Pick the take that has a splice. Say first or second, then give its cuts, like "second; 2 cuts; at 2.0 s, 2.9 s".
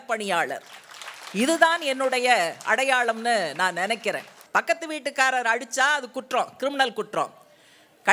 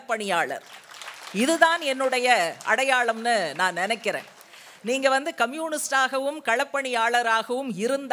first; 1 cut; at 4.3 s